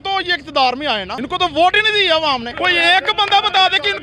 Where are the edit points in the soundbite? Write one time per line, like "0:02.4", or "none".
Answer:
0:01.1
0:02.5